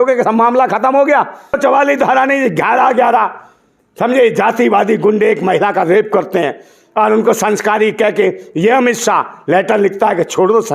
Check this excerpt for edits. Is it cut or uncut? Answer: cut